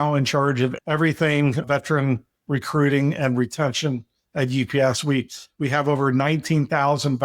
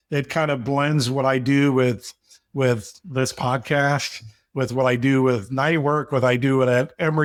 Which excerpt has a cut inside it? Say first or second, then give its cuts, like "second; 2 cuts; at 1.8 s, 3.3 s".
first; 2 cuts; at 0.8 s, 1.6 s